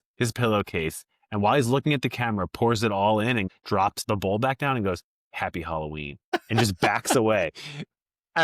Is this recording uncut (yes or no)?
no